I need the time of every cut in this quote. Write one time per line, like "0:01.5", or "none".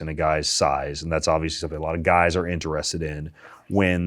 none